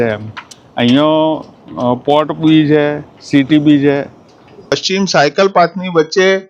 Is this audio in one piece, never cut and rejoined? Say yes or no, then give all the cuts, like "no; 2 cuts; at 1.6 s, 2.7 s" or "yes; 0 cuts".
no; 1 cut; at 4.8 s